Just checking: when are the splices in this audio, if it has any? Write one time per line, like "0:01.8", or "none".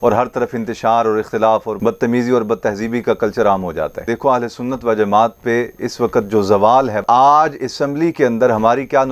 0:04.0
0:07.0